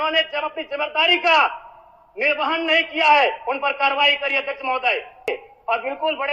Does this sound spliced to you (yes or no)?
yes